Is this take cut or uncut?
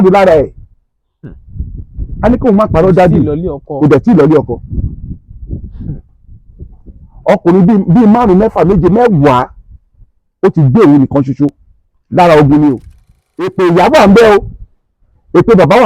cut